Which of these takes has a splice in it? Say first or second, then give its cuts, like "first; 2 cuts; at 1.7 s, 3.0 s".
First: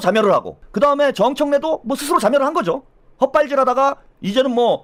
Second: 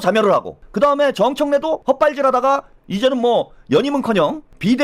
second; 1 cut; at 1.8 s